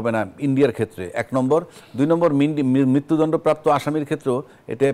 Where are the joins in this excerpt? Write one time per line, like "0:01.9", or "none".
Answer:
none